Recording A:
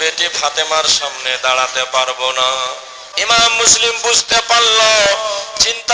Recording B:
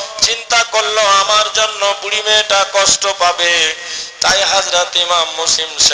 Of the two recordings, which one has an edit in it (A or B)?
A